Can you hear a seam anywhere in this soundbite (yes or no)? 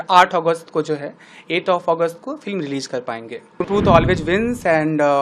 yes